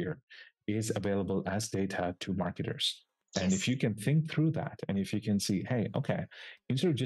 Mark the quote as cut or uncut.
uncut